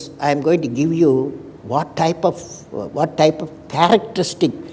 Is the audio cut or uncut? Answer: uncut